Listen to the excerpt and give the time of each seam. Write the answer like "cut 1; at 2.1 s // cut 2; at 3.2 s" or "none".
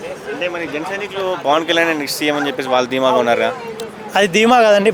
none